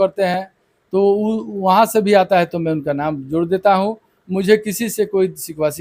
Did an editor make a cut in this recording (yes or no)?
no